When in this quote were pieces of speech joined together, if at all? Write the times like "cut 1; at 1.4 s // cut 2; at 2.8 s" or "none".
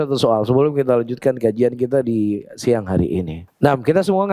cut 1; at 3.4 s

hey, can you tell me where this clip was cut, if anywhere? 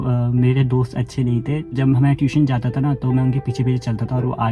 cut 1; at 1.7 s

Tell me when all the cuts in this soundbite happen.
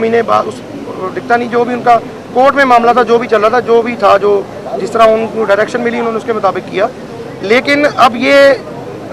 none

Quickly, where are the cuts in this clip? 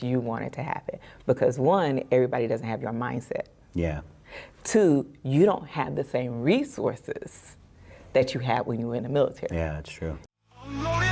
cut 1; at 10.2 s

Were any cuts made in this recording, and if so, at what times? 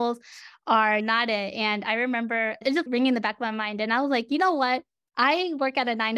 cut 1; at 2.9 s // cut 2; at 5.0 s

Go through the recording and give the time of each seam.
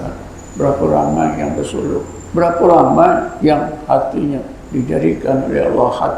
cut 1; at 2.2 s // cut 2; at 3.3 s // cut 3; at 4.6 s

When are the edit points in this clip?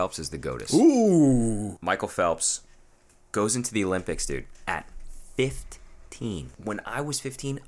cut 1; at 1.7 s // cut 2; at 6.5 s

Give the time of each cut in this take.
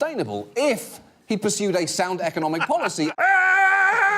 cut 1; at 3.1 s

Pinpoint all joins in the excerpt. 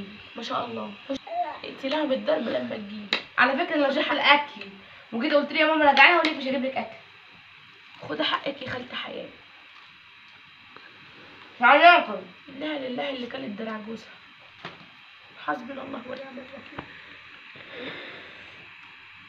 cut 1; at 1.2 s

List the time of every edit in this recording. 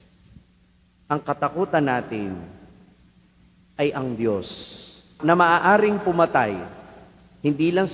cut 1; at 5.2 s

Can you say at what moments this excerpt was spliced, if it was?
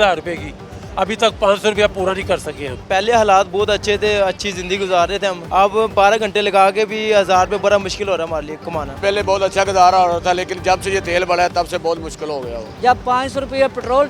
cut 1; at 2.8 s // cut 2; at 5.4 s // cut 3; at 9.0 s // cut 4; at 12.6 s

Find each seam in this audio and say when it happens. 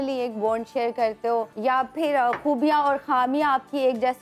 cut 1; at 1.5 s

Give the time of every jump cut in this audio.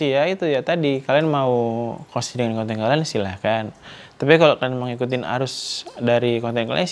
none

